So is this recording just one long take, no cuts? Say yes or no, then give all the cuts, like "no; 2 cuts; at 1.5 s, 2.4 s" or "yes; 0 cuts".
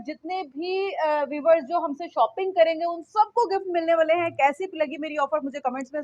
yes; 0 cuts